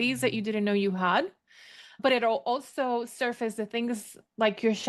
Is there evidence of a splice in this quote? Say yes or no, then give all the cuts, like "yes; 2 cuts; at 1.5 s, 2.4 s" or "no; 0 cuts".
yes; 1 cut; at 2.0 s